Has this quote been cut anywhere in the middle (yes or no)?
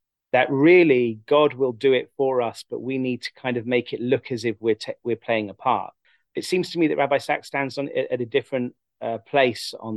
yes